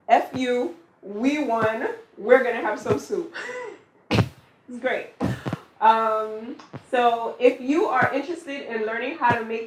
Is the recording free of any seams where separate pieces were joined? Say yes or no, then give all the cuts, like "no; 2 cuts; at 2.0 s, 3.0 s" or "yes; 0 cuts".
yes; 0 cuts